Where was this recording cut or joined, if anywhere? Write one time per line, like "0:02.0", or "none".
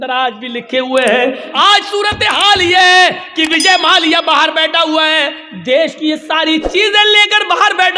0:01.4